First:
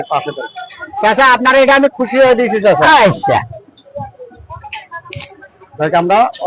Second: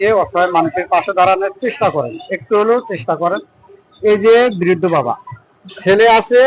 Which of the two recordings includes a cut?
first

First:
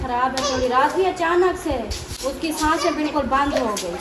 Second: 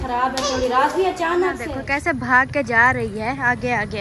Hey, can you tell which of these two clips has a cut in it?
second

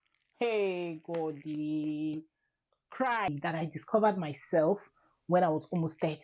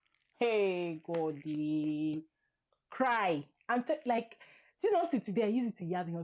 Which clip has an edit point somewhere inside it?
first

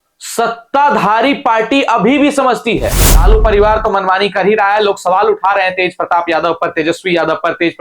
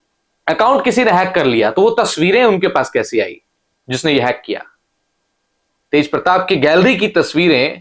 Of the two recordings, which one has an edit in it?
first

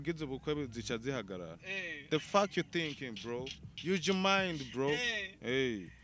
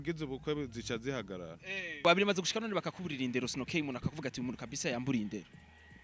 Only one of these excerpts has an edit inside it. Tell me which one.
second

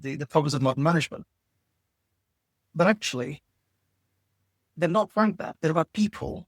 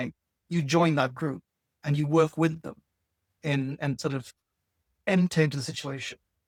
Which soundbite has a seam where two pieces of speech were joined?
first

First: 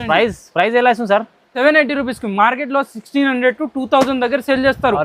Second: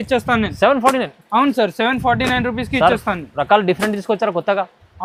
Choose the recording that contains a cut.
first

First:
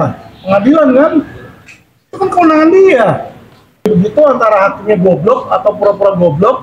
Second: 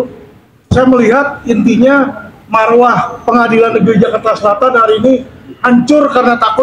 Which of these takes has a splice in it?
first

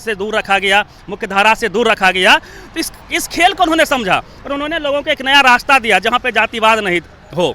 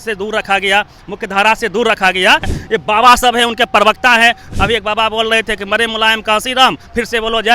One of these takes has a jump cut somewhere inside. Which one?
second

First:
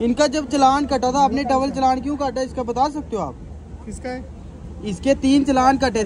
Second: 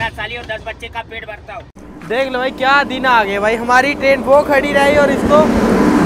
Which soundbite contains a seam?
second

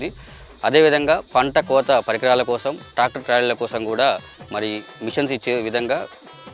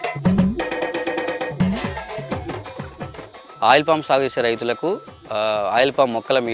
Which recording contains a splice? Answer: second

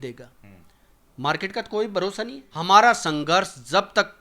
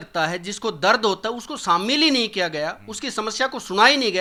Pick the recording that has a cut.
first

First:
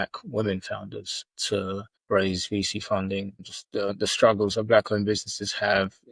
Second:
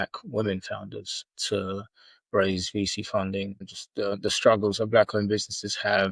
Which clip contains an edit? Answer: first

